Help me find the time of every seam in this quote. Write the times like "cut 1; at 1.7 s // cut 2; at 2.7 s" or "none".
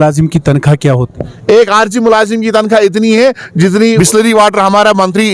cut 1; at 4.0 s

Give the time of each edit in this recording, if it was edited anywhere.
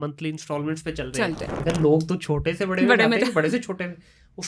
cut 1; at 1.6 s

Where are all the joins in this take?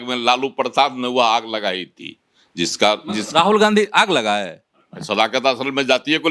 none

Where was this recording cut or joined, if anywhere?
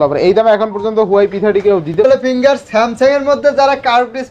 cut 1; at 1.9 s

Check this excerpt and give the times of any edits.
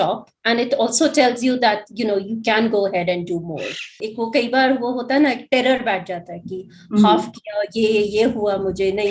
cut 1; at 4.0 s

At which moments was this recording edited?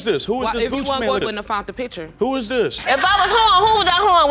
cut 1; at 2.7 s

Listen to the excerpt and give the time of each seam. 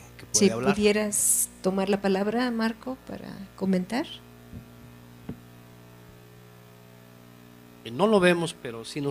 cut 1; at 7.5 s

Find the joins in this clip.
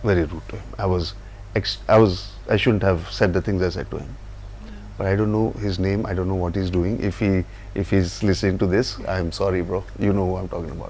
none

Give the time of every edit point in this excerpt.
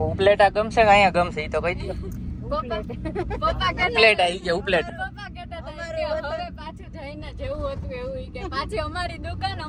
none

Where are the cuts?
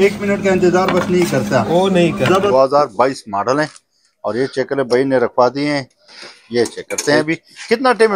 cut 1; at 2.5 s

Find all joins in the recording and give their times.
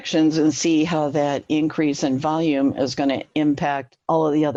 none

